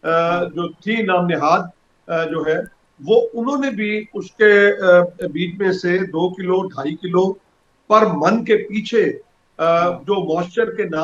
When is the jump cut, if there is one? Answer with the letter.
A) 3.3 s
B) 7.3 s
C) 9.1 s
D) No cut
D